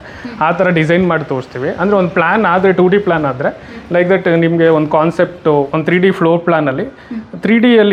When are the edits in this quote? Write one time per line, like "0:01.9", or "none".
none